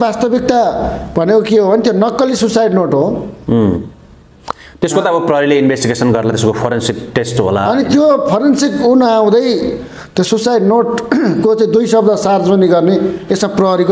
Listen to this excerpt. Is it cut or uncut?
uncut